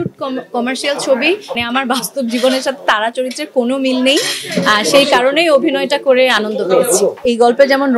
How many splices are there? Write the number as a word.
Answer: two